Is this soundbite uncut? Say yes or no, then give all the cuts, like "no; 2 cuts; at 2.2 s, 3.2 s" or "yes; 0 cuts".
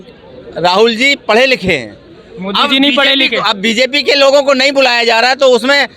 yes; 0 cuts